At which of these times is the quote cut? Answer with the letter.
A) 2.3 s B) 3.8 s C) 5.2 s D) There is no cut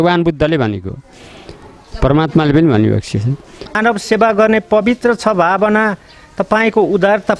B